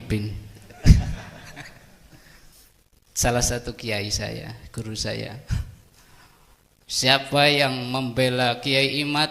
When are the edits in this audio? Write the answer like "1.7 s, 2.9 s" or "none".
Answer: 2.6 s

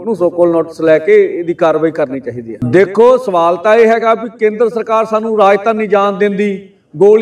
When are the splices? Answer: 2.5 s

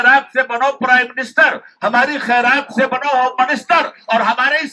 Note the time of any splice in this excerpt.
none

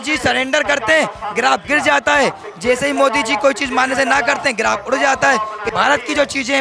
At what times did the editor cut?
5.7 s

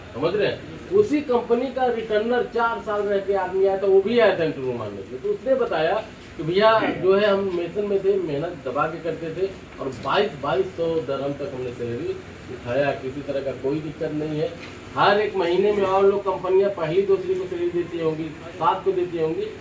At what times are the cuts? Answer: none

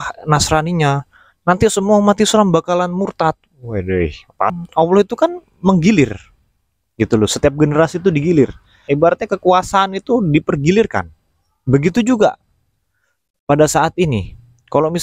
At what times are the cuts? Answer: 4.5 s, 8.8 s

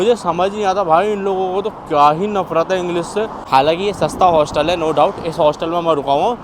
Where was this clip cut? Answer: 3.4 s

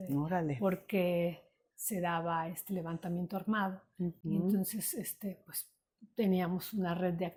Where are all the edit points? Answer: none

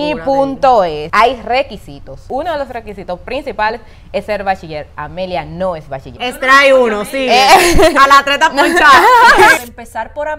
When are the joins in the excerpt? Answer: 1.0 s, 2.2 s, 6.1 s, 9.6 s

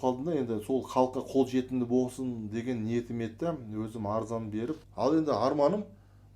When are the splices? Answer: 4.9 s

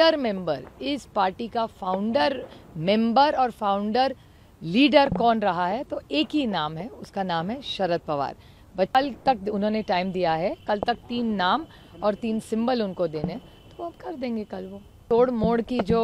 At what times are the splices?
9.0 s, 15.0 s

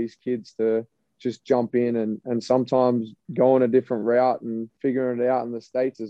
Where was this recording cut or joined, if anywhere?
3.2 s, 4.7 s

